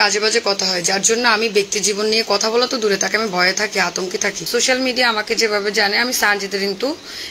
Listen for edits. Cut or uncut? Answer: cut